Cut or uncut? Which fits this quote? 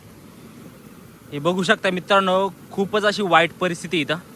uncut